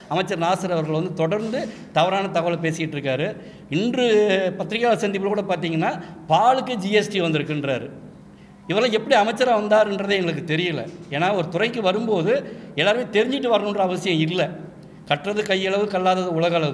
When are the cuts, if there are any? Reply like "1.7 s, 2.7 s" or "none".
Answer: none